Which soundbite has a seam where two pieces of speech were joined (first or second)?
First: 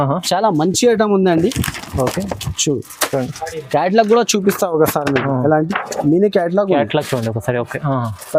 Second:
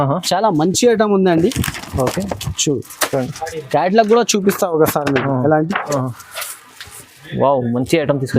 second